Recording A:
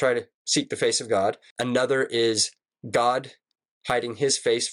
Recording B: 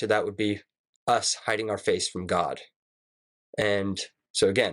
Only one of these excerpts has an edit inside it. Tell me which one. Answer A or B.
A